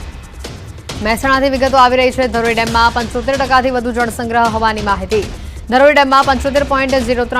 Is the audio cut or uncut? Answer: cut